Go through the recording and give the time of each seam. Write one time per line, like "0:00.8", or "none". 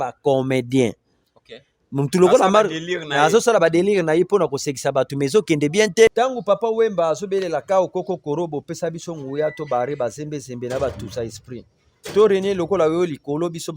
0:06.1